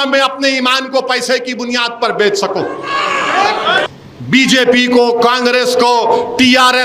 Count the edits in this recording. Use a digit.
1